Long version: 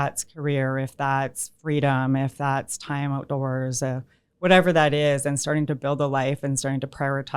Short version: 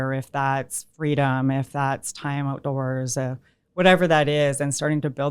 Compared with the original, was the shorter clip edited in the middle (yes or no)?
no